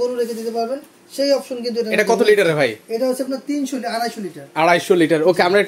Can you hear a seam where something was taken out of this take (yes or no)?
no